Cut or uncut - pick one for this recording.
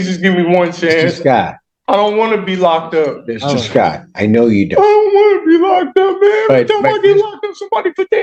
uncut